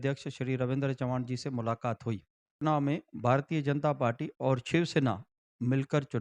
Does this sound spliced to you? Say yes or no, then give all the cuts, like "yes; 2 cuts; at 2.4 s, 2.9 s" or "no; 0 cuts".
yes; 1 cut; at 2.6 s